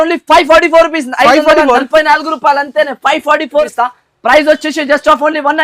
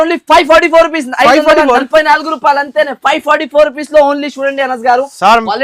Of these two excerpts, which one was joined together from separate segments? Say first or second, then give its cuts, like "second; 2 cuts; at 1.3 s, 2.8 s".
first; 1 cut; at 3.7 s